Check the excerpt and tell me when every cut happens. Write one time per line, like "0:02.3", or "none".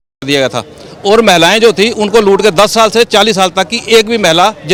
none